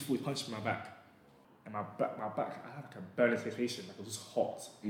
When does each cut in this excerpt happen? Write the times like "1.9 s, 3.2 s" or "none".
1.3 s